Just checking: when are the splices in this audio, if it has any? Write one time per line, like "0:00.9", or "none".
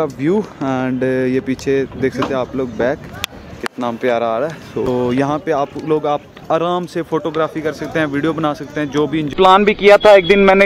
0:04.9
0:09.3